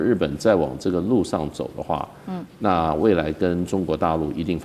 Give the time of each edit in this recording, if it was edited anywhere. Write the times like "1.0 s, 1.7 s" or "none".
none

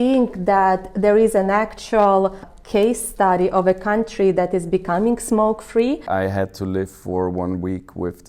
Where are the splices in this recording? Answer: 2.5 s, 6.0 s

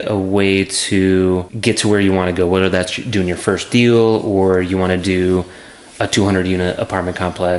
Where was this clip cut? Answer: 1.5 s

